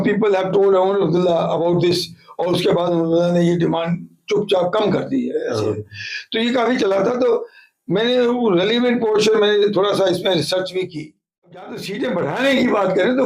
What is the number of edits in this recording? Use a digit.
1